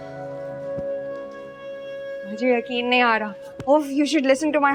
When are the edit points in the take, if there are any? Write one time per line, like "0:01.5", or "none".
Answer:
none